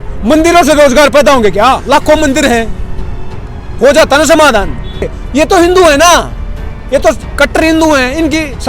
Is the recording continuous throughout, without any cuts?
no; 1 cut; at 5.2 s

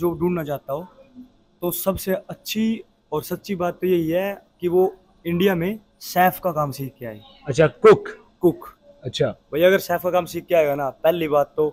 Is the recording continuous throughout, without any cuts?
yes; 0 cuts

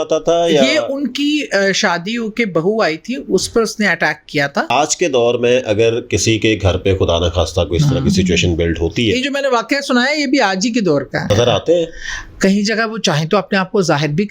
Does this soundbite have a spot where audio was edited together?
yes; 2 cuts; at 4.7 s, 11.3 s

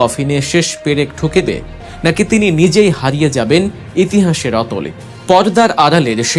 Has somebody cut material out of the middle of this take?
yes; 1 cut; at 1.4 s

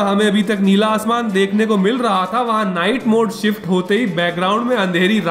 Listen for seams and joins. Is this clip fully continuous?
yes; 0 cuts

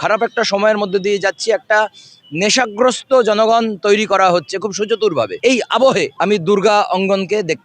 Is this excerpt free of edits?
no; 2 cuts; at 5.3 s, 6.1 s

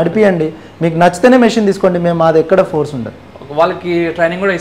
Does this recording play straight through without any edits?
yes; 0 cuts

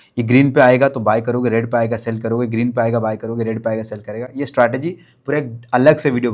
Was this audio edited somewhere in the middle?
no; 0 cuts

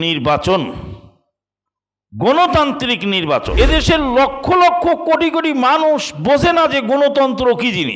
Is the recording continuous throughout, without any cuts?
no; 1 cut; at 3.5 s

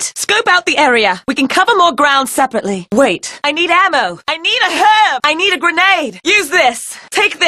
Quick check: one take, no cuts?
no; 1 cut; at 5.9 s

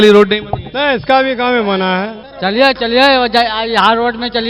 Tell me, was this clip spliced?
yes; 1 cut; at 2.2 s

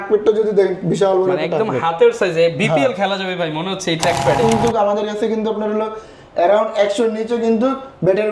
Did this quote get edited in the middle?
yes; 1 cut; at 4.4 s

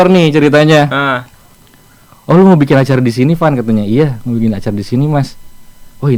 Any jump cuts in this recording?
no; 0 cuts

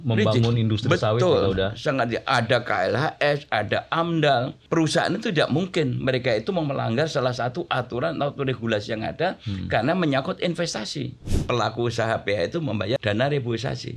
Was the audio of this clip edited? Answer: yes; 3 cuts; at 4.6 s, 11.3 s, 13.0 s

